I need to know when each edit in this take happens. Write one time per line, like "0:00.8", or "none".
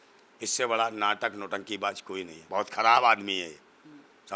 0:02.4

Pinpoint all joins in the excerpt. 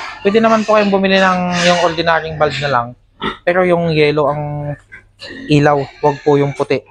none

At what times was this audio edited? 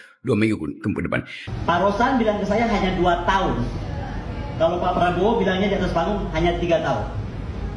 0:01.4

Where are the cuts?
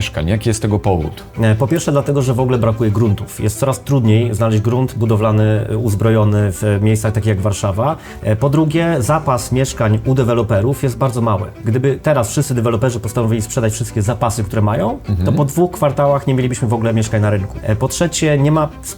0:01.2
0:08.1
0:11.6
0:17.5

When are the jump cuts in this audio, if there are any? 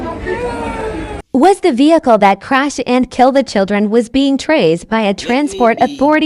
0:01.2

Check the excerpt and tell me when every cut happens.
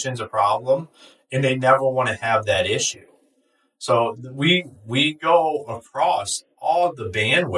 none

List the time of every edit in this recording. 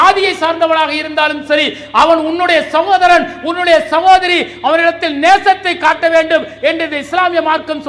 none

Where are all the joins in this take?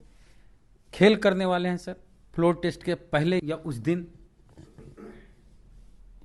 none

